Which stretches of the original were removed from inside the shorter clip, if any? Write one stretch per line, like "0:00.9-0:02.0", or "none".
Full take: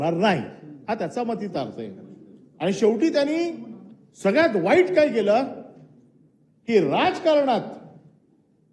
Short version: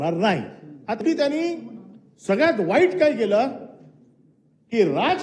0:01.0-0:03.0